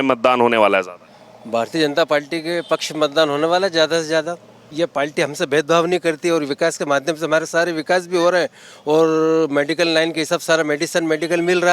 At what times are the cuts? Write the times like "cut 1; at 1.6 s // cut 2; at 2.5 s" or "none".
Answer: cut 1; at 4.6 s